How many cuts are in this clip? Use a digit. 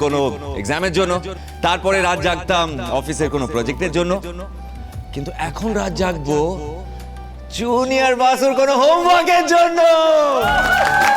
0